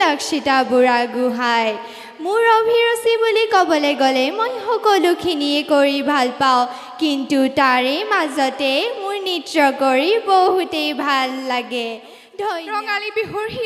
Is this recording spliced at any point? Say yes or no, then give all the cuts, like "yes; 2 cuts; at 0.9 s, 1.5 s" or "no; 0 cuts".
yes; 1 cut; at 12.6 s